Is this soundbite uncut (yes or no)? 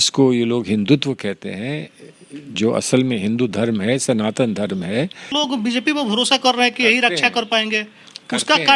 no